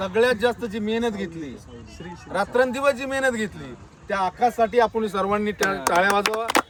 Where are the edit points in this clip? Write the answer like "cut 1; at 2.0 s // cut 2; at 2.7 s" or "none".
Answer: none